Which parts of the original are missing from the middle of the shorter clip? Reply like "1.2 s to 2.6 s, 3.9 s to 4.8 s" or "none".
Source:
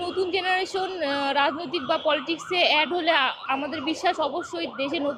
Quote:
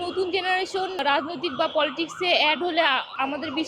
1.0 s to 1.3 s